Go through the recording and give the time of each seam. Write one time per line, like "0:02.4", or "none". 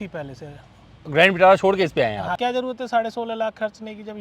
0:02.3